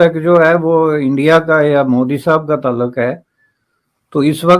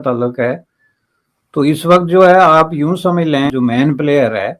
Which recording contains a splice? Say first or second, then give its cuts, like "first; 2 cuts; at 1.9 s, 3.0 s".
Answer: second; 1 cut; at 3.5 s